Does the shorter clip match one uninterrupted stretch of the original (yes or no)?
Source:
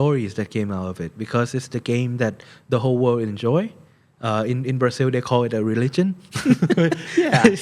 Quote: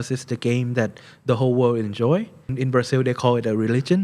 no